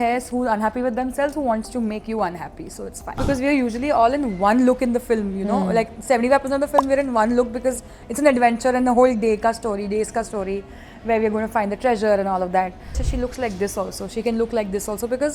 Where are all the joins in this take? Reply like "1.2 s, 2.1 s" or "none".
3.2 s, 13.0 s